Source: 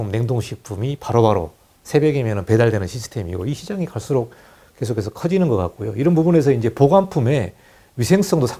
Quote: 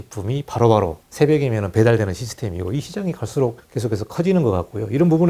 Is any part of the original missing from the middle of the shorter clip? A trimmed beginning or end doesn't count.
yes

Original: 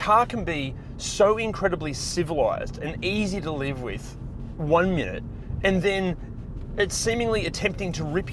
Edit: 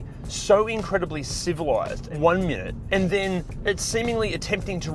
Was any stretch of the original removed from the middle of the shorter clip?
yes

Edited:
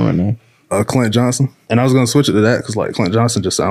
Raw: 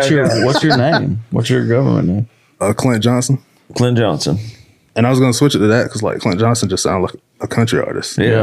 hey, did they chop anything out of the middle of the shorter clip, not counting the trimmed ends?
yes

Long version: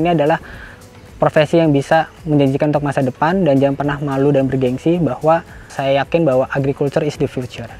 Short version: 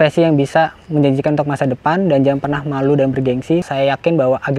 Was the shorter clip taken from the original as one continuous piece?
no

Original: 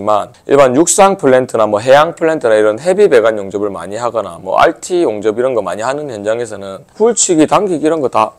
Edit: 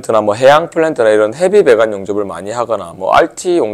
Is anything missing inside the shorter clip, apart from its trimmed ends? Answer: no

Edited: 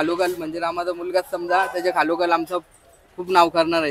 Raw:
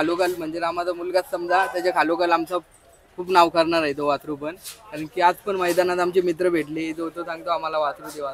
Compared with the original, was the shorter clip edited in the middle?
no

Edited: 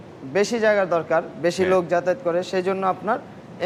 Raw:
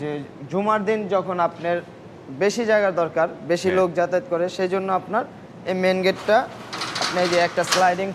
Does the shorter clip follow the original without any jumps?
yes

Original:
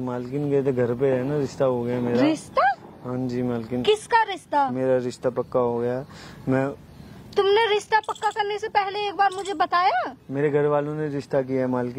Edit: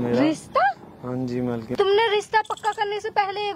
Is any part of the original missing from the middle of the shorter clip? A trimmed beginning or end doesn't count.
yes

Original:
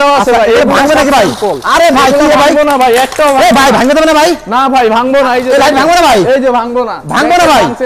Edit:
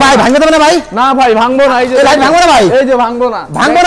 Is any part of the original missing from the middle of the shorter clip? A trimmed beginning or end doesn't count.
no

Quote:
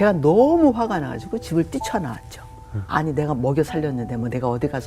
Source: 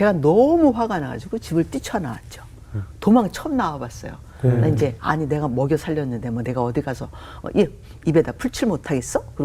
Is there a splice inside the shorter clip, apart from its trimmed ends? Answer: yes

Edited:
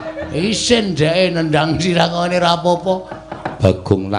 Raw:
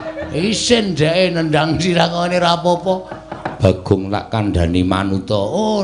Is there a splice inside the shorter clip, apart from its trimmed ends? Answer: no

